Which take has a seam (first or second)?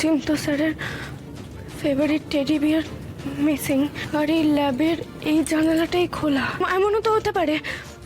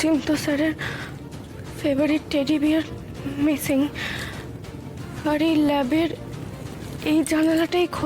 first